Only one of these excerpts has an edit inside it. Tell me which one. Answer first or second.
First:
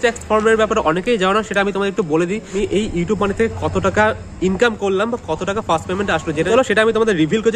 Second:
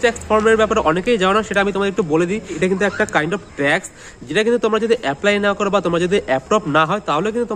first